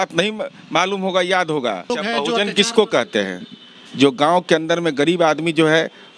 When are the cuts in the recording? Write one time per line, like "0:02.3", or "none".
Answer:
0:01.9